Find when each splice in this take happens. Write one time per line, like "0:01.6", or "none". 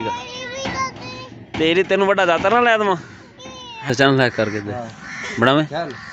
0:03.8

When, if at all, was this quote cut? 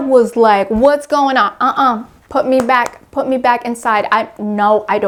none

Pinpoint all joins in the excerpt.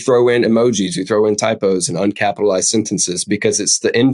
none

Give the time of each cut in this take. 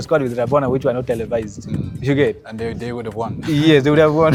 none

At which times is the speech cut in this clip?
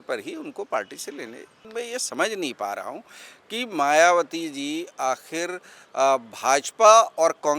0:01.6

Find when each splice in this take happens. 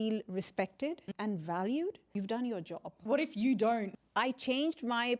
0:01.0
0:02.2
0:03.0
0:04.0

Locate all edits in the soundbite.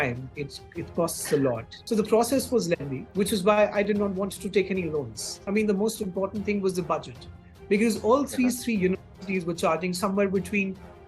0:01.7
0:03.0
0:05.5

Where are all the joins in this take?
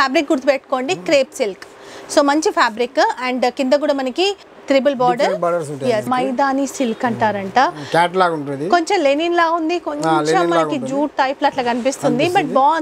0:04.5
0:06.1

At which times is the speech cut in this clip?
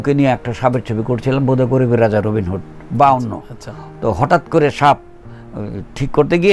none

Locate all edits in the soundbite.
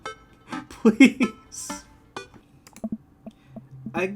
0:02.3

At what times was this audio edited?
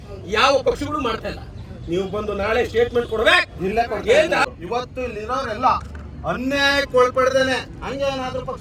0:04.5

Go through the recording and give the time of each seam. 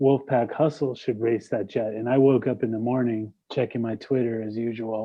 none

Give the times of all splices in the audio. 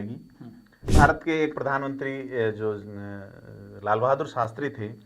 0:00.9

